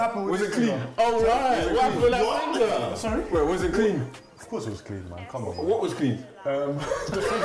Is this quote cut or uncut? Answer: uncut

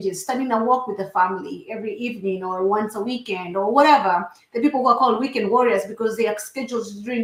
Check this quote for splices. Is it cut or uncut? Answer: uncut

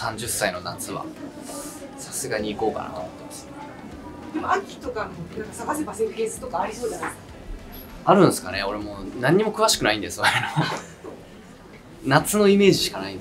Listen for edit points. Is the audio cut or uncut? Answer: uncut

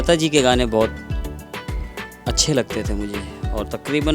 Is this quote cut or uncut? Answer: uncut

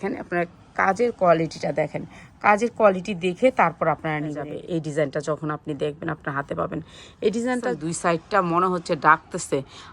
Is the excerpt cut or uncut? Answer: cut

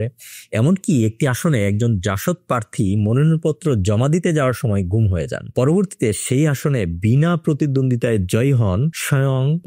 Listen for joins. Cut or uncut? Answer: uncut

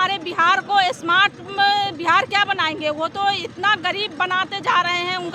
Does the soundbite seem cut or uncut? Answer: uncut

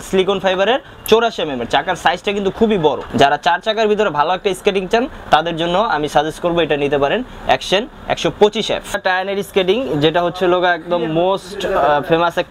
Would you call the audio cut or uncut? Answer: cut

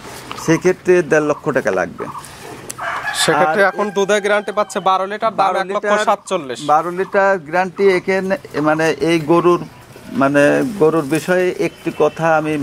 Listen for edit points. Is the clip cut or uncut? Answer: uncut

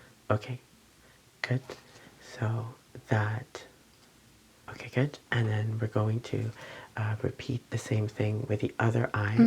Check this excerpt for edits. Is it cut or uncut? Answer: cut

